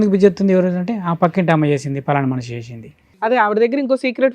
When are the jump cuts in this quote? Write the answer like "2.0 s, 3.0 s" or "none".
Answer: 3.3 s